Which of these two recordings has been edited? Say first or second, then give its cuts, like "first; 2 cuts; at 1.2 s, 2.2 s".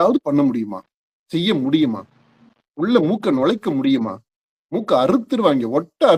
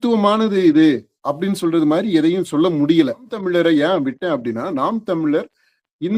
second; 1 cut; at 3.4 s